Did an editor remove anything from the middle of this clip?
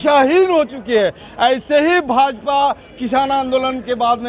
no; 0 cuts

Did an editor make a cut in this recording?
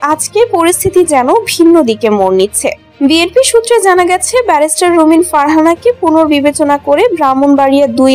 no; 0 cuts

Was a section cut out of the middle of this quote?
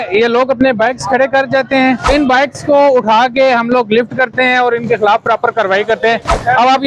yes; 1 cut; at 2.1 s

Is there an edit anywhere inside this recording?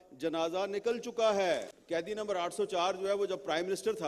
yes; 1 cut; at 1.7 s

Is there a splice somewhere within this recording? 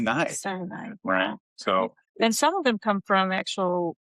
yes; 1 cut; at 2.0 s

